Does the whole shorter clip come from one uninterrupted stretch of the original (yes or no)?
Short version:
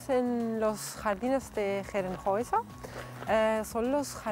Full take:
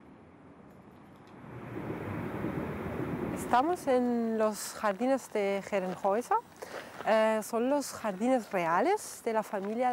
yes